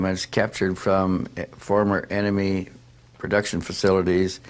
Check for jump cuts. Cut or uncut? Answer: cut